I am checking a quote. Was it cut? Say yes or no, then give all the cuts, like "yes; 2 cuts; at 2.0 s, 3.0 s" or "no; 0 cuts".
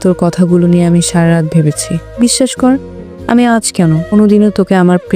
yes; 1 cut; at 2.0 s